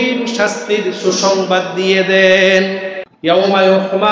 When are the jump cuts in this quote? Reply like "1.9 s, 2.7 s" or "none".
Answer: 3.0 s